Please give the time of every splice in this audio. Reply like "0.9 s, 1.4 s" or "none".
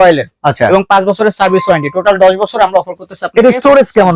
none

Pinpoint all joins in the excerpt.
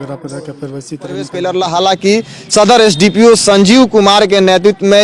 1.3 s

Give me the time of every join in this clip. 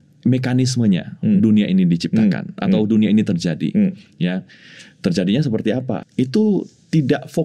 6.0 s

